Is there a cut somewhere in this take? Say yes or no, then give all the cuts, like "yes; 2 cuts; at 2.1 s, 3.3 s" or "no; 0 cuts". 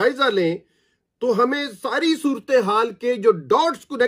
no; 0 cuts